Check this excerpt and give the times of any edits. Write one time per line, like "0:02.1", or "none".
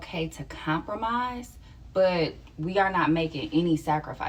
none